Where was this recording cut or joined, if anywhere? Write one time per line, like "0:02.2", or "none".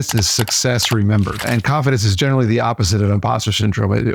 0:01.4